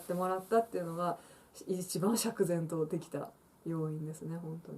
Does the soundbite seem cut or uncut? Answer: uncut